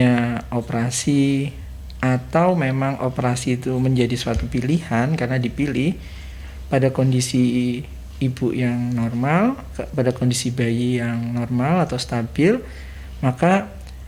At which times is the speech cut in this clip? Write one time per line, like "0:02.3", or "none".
none